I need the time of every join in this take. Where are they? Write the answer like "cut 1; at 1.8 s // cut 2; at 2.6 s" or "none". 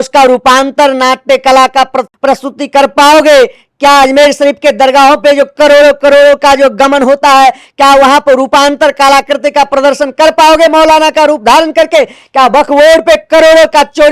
cut 1; at 2.1 s